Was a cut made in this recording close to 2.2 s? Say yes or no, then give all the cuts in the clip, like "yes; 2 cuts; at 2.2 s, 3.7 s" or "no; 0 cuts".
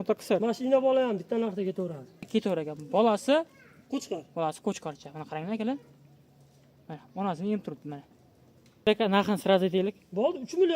yes; 2 cuts; at 2.2 s, 8.9 s